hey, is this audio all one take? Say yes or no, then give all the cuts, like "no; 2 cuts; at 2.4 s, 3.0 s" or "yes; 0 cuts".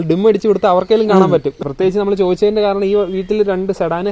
no; 1 cut; at 1.6 s